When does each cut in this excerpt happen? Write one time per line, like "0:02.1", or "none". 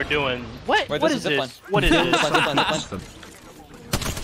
0:02.9

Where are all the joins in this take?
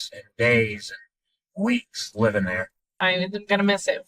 0:02.9

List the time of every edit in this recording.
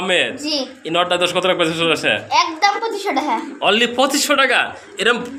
none

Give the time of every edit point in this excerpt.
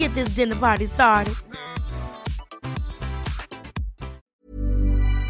0:04.3

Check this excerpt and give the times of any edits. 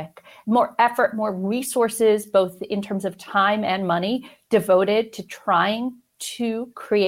none

